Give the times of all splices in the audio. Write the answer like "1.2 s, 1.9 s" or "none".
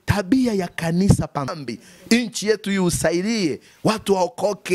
1.5 s